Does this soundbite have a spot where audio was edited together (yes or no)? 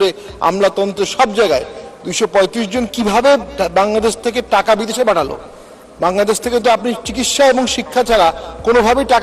no